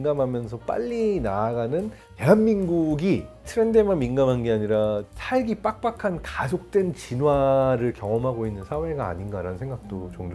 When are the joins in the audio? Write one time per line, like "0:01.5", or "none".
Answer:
none